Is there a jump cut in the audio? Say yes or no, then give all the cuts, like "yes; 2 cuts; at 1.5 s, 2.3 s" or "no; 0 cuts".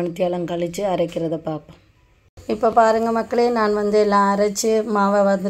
yes; 1 cut; at 2.4 s